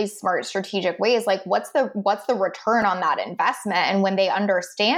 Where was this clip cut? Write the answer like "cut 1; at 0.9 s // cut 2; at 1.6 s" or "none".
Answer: none